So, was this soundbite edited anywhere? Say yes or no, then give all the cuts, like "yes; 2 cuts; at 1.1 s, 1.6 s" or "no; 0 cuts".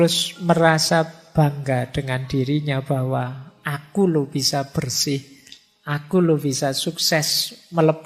yes; 1 cut; at 1.2 s